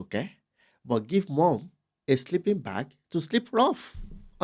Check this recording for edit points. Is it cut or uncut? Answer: uncut